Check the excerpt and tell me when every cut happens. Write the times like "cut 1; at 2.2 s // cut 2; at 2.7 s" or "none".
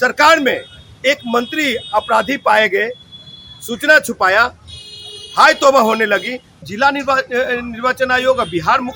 cut 1; at 6.7 s